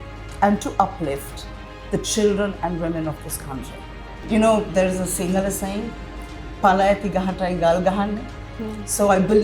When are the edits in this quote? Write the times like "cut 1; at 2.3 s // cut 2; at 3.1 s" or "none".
cut 1; at 4.2 s